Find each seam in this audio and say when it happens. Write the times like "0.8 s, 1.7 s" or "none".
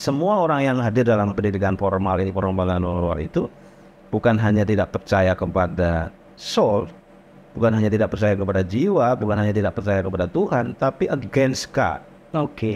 none